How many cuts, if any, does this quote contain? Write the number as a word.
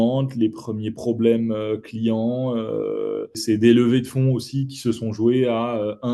one